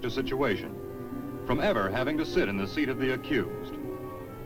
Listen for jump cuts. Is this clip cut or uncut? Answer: cut